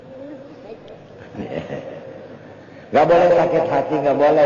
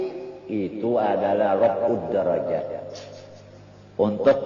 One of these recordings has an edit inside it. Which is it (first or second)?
first